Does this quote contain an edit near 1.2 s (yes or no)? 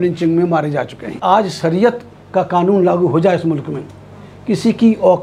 yes